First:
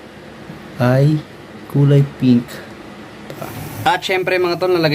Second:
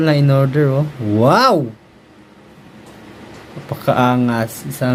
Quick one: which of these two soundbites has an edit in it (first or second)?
first